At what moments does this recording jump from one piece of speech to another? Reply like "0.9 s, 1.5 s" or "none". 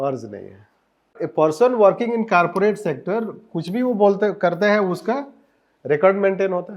1.1 s